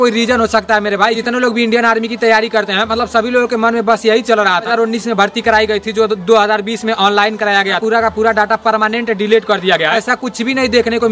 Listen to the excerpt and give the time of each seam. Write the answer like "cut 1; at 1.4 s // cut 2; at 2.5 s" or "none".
cut 1; at 1.2 s // cut 2; at 4.7 s // cut 3; at 7.8 s // cut 4; at 9.9 s